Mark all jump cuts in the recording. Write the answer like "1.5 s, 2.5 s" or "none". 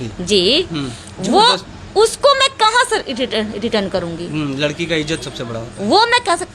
none